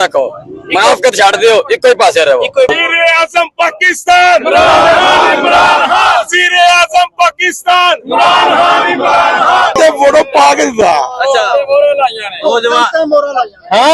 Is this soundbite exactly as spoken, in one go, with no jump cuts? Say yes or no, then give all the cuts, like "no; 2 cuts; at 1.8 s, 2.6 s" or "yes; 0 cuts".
no; 2 cuts; at 2.7 s, 9.8 s